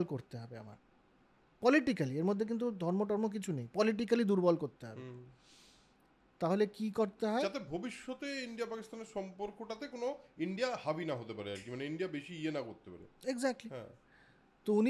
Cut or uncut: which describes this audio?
uncut